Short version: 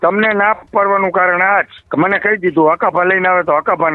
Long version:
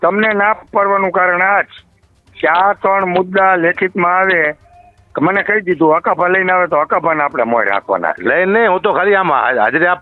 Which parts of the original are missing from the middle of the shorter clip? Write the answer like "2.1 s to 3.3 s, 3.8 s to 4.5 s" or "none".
1.8 s to 5.0 s